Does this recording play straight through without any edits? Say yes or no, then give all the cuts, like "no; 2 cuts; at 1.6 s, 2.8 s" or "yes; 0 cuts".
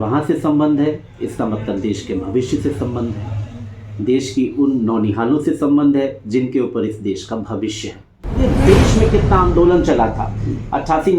no; 1 cut; at 8.4 s